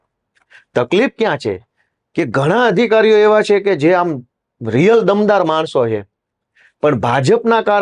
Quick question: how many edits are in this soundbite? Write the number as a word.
zero